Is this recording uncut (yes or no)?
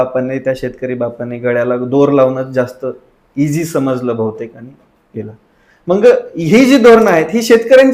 yes